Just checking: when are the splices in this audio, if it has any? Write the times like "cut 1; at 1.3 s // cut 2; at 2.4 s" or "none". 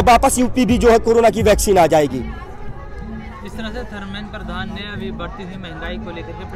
none